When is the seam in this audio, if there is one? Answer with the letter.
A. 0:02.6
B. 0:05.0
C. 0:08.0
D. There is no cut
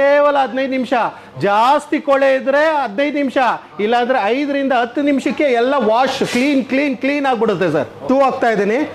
C